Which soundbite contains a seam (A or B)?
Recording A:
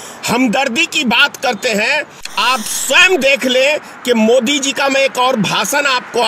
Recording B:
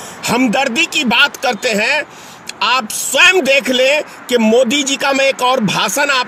A